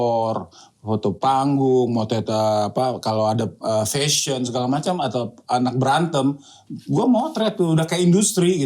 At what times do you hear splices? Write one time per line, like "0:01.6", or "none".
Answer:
none